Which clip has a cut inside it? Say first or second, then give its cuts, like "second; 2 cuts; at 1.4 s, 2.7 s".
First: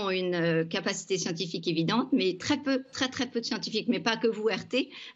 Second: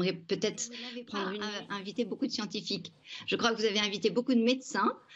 second; 1 cut; at 1.4 s